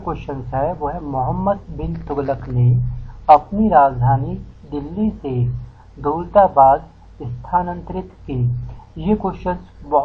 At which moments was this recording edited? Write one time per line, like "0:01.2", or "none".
0:02.1

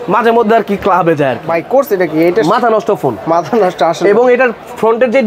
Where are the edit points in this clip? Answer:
0:01.4

